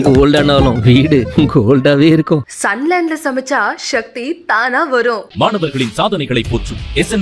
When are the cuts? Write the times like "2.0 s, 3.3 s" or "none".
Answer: none